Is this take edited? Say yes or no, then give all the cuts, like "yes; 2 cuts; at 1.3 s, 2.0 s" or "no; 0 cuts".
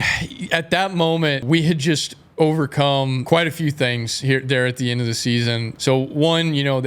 yes; 3 cuts; at 1.4 s, 3.2 s, 5.7 s